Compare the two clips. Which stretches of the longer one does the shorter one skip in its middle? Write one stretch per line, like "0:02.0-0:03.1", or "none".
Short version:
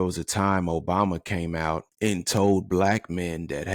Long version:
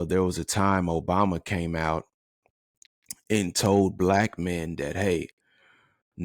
0:02.1-0:03.2